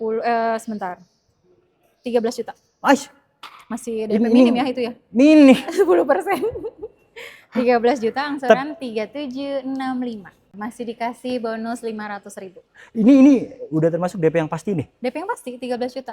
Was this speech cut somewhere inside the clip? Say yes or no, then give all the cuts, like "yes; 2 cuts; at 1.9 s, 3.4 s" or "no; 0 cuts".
yes; 1 cut; at 10.6 s